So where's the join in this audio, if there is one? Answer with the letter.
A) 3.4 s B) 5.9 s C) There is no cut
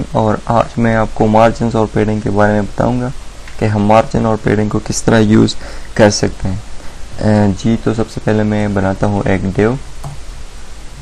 C